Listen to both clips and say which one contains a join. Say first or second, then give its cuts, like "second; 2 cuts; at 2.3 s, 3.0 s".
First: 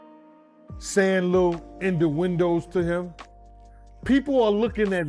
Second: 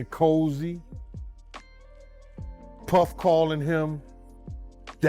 first; 1 cut; at 0.9 s